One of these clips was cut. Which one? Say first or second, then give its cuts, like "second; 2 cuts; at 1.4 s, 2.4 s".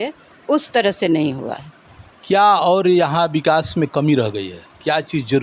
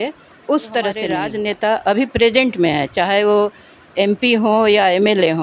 second; 1 cut; at 1.2 s